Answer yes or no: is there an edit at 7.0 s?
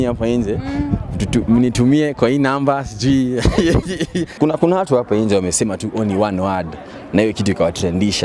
no